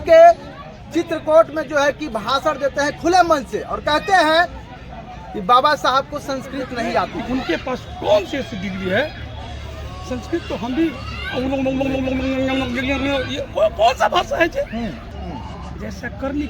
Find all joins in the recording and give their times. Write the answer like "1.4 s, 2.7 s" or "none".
7.2 s, 15.2 s